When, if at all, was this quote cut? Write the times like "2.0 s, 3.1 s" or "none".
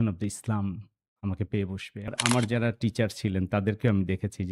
2.1 s